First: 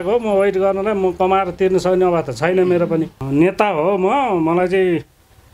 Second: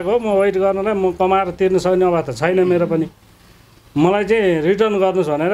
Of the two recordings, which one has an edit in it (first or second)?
first